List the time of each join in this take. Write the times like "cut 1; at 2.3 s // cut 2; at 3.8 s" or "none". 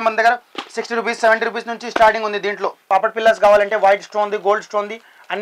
cut 1; at 2.8 s